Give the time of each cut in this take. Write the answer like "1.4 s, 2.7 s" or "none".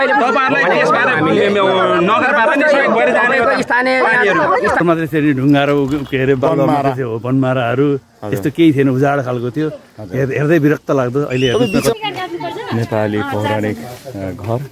4.8 s, 11.9 s